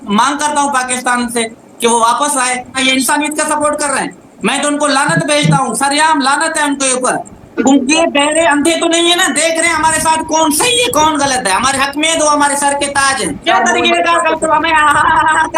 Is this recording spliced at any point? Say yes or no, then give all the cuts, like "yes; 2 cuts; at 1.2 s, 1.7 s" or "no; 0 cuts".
yes; 3 cuts; at 2.8 s, 7.6 s, 13.4 s